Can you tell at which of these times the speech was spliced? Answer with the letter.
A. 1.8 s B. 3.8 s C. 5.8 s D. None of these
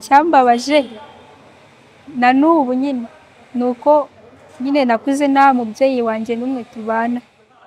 D